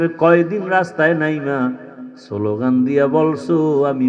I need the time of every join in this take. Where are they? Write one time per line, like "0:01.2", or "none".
none